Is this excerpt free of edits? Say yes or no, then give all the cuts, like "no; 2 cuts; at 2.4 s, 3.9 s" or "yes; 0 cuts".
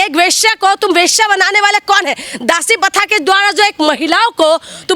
yes; 0 cuts